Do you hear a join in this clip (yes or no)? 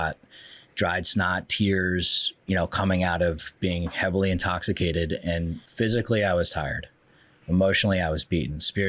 yes